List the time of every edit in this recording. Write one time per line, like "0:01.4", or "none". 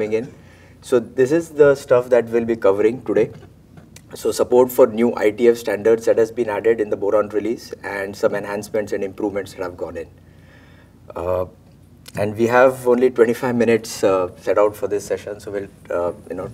0:10.7